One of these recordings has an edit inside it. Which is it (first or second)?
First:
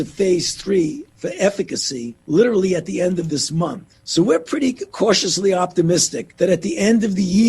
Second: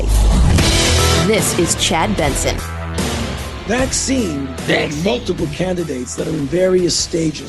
second